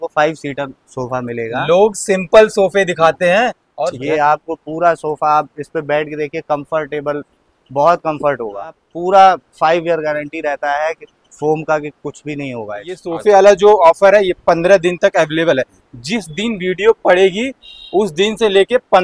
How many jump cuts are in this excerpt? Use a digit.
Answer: 3